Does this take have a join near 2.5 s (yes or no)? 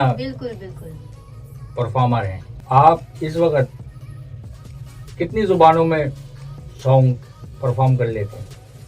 yes